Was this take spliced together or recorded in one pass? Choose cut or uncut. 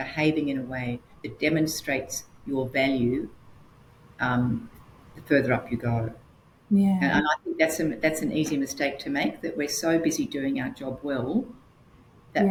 uncut